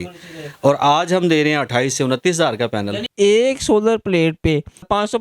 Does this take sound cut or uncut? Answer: cut